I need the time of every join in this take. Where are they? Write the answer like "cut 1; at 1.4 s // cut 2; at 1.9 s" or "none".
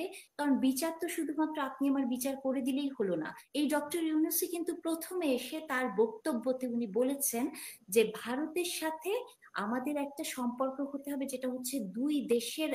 cut 1; at 3.4 s